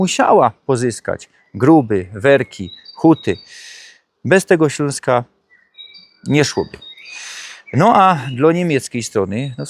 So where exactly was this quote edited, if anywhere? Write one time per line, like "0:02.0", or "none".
none